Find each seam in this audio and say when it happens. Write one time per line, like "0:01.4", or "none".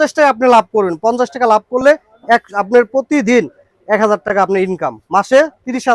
none